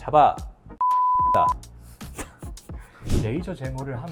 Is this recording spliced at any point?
no; 0 cuts

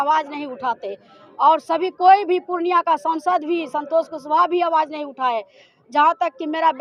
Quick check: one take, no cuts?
yes; 0 cuts

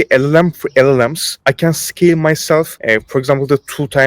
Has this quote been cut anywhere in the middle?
yes; 2 cuts; at 1.3 s, 2.8 s

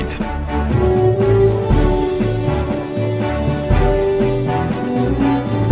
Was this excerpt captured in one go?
no; 1 cut; at 2.2 s

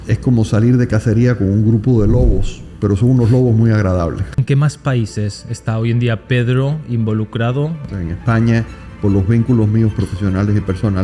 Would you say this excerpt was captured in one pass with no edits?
no; 2 cuts; at 4.4 s, 7.9 s

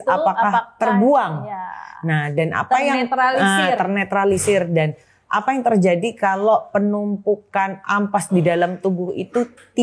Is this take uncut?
yes; 0 cuts

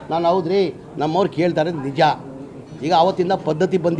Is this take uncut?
yes; 0 cuts

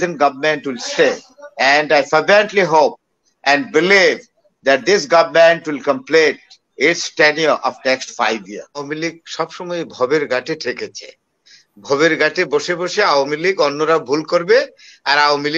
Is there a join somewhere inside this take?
yes; 1 cut; at 8.9 s

